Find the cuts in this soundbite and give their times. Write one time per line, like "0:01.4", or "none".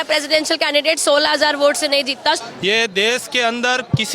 0:02.4